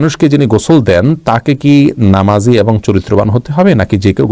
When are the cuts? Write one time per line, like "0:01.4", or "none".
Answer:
none